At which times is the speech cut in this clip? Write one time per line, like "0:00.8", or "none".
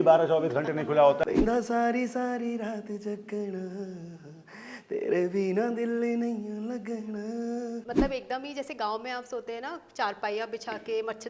0:01.2
0:07.9